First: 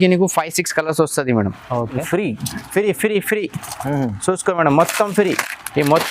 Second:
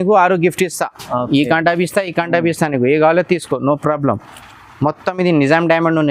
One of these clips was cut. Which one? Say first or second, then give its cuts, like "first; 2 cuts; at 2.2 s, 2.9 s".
first; 1 cut; at 2.0 s